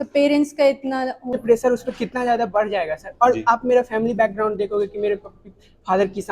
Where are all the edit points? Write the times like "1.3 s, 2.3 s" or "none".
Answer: 1.3 s